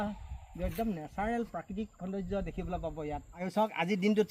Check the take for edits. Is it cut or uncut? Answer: uncut